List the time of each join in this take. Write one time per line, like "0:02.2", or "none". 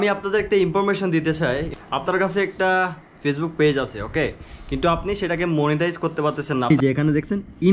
0:01.7
0:06.7